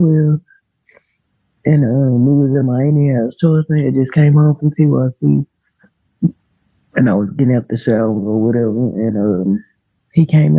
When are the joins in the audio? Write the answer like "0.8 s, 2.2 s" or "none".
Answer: none